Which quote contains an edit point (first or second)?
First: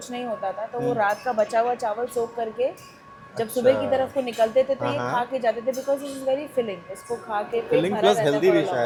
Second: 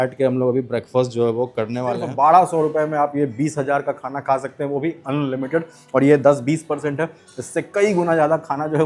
second